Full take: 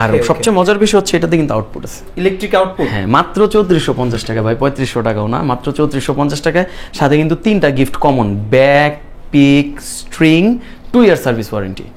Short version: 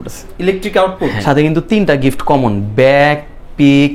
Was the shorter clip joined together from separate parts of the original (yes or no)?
yes